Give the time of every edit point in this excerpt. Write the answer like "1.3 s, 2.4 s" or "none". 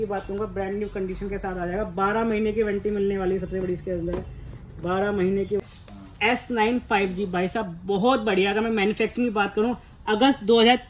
5.6 s